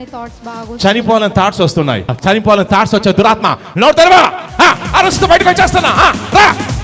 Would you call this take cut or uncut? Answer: cut